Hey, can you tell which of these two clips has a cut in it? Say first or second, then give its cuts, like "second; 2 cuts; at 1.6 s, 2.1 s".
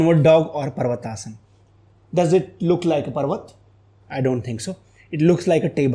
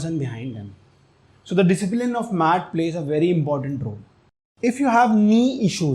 second; 1 cut; at 4.5 s